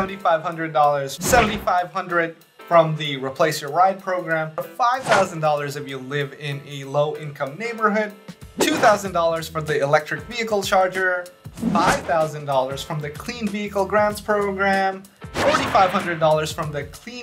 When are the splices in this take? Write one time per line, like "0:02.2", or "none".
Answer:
0:01.1
0:04.7